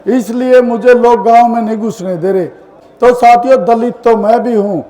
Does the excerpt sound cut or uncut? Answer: cut